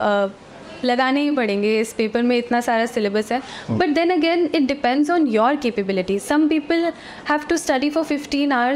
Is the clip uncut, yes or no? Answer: yes